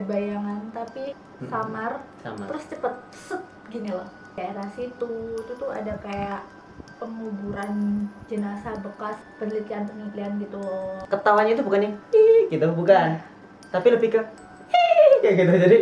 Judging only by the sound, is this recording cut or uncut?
cut